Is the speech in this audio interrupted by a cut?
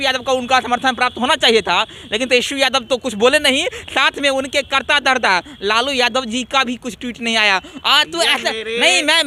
no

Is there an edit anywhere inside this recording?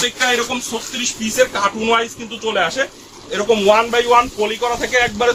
no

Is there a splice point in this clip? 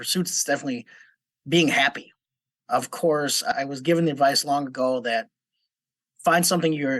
yes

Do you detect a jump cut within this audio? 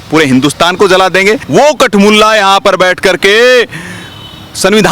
yes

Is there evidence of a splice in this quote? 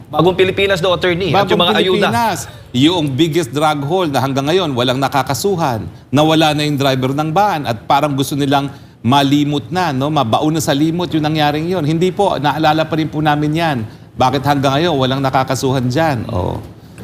no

